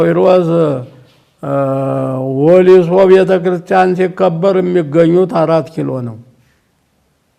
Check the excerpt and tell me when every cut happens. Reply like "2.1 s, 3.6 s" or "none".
none